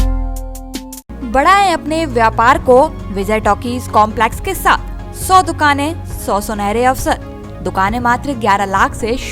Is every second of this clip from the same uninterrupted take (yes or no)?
yes